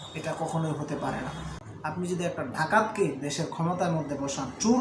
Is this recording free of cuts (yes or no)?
no